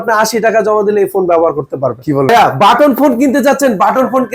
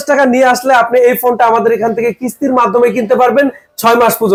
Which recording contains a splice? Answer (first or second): first